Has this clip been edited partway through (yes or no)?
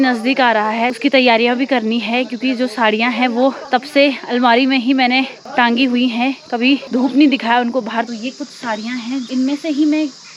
yes